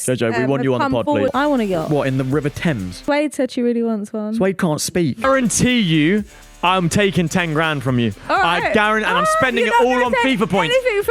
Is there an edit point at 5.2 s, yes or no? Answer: yes